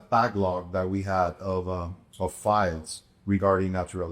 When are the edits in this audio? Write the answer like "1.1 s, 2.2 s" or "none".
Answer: none